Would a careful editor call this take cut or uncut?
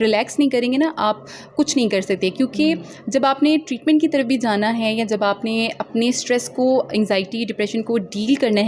uncut